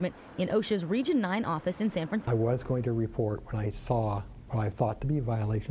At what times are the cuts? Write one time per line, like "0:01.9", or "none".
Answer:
0:02.2